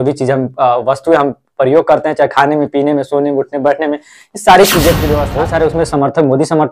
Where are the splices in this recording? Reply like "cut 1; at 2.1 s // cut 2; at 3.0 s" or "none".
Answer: cut 1; at 5.3 s